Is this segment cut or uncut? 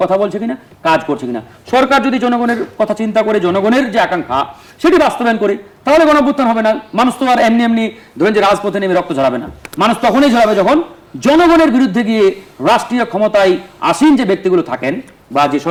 uncut